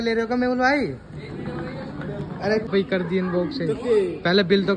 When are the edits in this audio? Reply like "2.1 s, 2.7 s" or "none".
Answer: 2.7 s